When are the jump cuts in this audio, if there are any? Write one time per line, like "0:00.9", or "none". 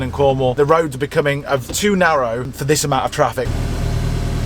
0:02.5
0:03.5